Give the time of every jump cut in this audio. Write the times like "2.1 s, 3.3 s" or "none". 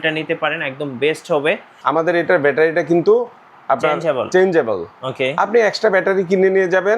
1.7 s